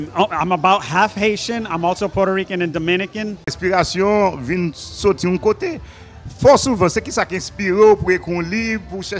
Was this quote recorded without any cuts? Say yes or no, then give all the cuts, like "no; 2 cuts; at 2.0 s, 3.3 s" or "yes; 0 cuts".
no; 1 cut; at 3.6 s